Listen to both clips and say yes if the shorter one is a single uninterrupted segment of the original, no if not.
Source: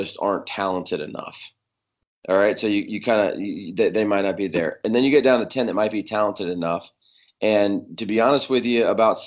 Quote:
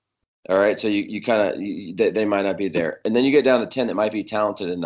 yes